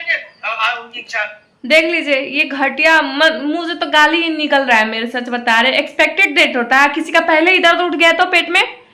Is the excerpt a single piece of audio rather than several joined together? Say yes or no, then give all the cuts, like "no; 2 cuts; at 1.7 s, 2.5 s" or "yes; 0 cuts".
yes; 0 cuts